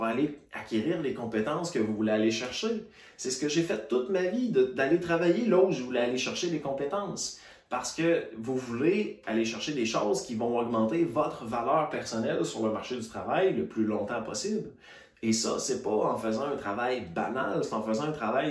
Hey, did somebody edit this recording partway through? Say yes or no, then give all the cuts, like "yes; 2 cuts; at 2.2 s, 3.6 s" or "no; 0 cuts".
no; 0 cuts